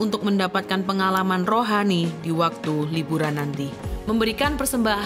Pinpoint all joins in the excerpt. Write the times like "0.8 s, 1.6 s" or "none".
3.9 s

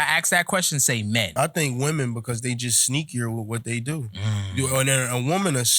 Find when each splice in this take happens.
1.3 s

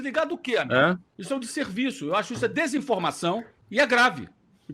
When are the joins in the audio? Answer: 1.1 s, 3.6 s

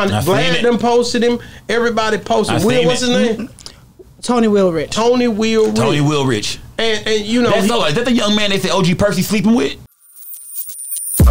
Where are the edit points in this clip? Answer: 9.8 s

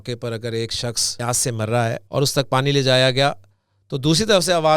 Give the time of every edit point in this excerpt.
1.1 s, 2.0 s

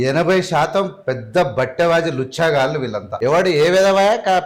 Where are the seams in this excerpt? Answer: 3.1 s

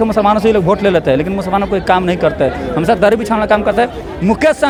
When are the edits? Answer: none

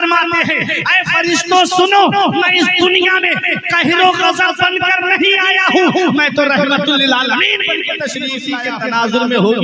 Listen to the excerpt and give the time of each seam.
8.5 s

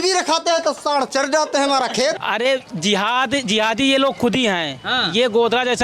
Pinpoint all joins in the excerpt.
2.2 s

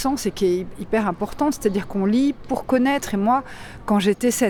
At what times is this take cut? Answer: none

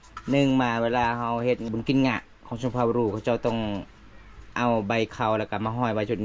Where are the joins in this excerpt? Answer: 1.6 s

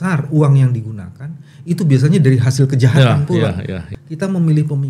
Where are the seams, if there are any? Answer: 3.9 s

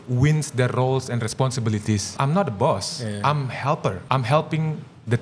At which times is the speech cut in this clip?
2.1 s, 4.0 s

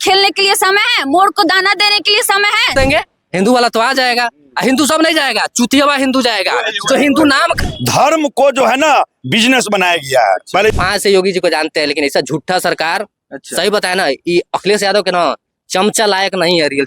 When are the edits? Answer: 2.7 s, 7.6 s, 10.7 s

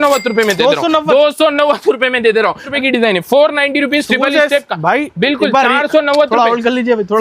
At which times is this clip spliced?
2.7 s

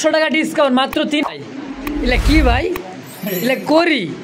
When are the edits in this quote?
1.2 s

